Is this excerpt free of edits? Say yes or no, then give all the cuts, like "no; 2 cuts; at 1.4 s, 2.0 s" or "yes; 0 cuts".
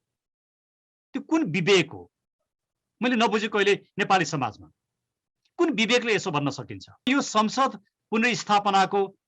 no; 1 cut; at 7.1 s